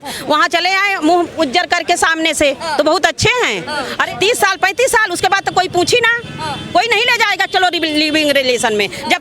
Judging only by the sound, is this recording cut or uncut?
cut